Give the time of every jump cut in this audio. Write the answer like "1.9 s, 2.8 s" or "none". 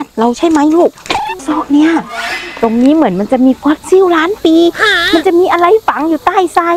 1.3 s, 2.5 s